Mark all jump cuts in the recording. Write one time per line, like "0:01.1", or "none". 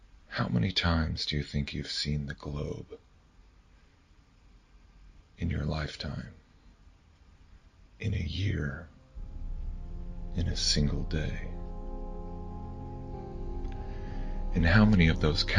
none